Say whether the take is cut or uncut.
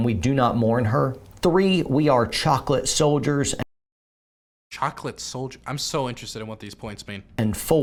uncut